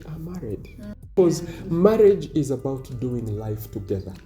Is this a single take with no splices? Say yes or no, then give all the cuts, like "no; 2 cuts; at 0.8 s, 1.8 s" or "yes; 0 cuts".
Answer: no; 1 cut; at 1.1 s